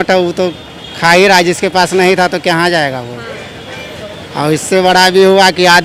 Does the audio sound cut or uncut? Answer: uncut